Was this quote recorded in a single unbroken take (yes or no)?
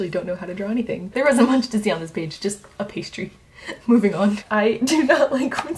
no